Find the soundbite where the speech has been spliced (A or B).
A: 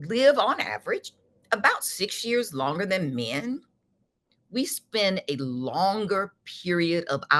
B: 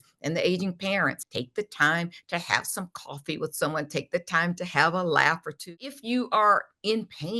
B